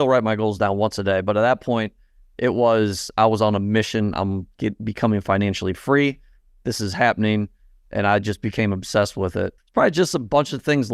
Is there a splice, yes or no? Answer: yes